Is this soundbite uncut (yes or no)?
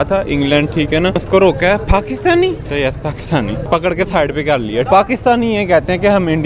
no